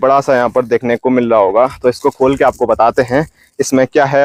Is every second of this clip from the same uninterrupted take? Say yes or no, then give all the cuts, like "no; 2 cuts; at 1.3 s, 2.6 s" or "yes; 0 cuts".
yes; 0 cuts